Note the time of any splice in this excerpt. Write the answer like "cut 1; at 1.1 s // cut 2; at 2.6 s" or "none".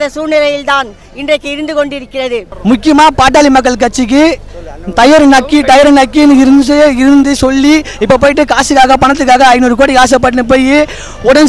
cut 1; at 2.5 s